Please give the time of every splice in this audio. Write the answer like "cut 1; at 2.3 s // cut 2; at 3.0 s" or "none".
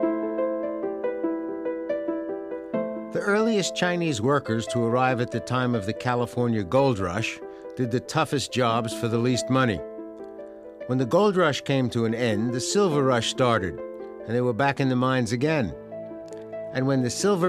none